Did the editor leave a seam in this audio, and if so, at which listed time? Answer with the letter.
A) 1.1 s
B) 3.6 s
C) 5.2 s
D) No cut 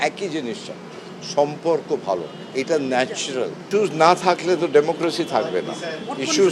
B